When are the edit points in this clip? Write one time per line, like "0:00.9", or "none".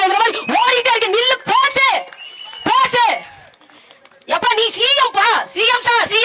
none